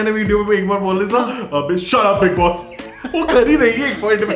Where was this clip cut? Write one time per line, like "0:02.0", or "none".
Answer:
none